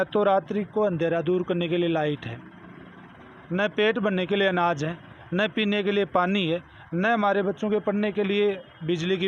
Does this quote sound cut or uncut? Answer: uncut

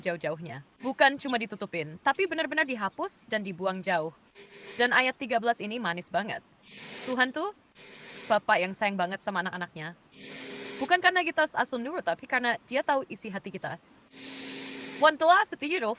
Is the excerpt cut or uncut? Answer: cut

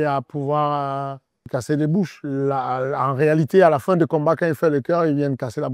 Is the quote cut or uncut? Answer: uncut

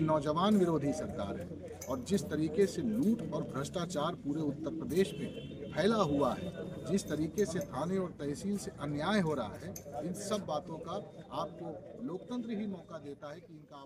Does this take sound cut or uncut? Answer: uncut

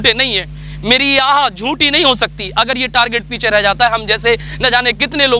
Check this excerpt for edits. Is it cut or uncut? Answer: uncut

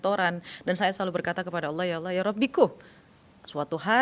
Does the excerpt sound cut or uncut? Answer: uncut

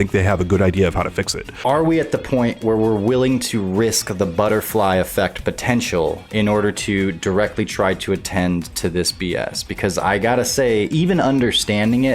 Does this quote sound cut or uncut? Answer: cut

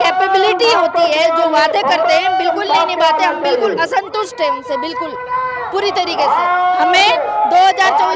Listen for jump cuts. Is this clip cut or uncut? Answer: uncut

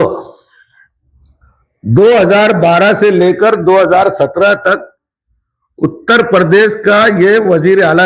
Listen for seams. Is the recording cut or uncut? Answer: uncut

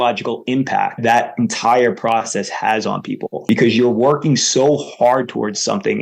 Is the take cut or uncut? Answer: cut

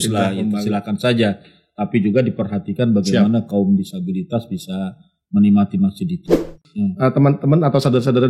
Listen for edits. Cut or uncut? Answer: cut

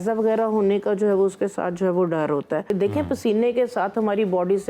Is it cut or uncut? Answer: cut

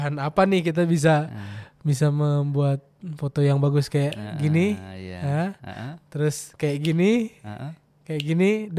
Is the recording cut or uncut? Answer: uncut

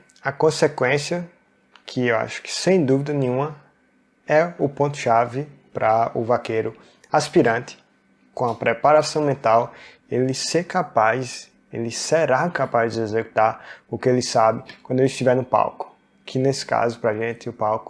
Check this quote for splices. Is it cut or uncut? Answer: uncut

